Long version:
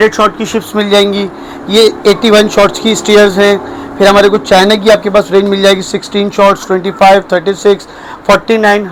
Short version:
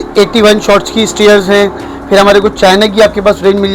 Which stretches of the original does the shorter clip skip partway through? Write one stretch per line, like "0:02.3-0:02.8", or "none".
none